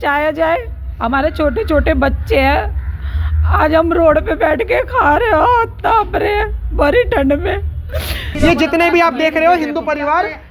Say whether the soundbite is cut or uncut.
cut